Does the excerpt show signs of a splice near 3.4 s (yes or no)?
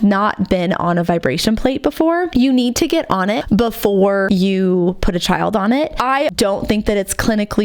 yes